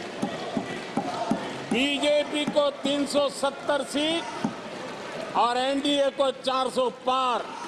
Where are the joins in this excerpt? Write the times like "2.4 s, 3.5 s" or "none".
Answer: none

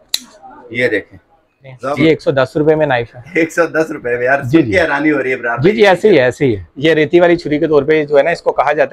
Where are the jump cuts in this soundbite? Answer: 1.7 s, 6.7 s

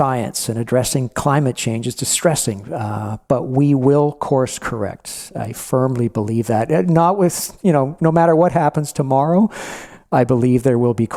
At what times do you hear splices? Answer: none

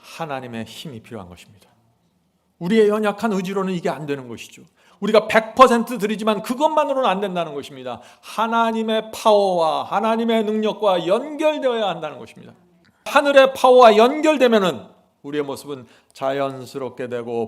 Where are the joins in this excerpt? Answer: 13.1 s

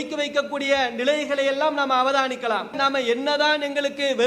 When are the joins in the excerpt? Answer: 2.8 s

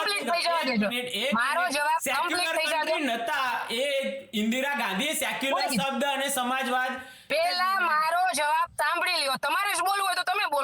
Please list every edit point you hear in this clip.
7.1 s

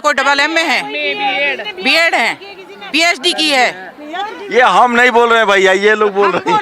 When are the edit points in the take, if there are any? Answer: none

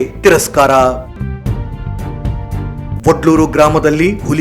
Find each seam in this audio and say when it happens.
1.1 s, 3.0 s

